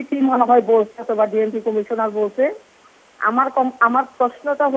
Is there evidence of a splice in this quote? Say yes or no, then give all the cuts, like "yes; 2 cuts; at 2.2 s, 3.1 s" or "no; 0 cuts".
no; 0 cuts